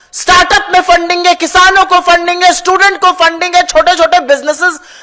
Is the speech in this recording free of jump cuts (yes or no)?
yes